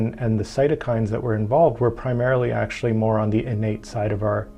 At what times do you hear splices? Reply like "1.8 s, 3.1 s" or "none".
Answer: none